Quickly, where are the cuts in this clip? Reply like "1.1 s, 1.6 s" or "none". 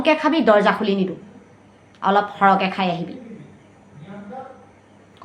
none